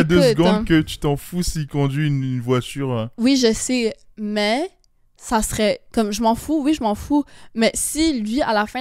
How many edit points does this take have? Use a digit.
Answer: 0